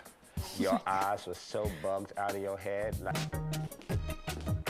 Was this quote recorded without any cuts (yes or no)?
no